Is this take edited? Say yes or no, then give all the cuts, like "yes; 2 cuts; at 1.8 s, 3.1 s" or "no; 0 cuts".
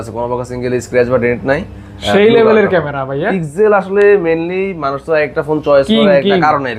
no; 0 cuts